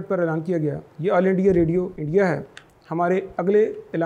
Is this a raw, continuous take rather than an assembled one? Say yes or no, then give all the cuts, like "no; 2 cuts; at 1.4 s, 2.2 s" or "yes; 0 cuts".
no; 1 cut; at 2.0 s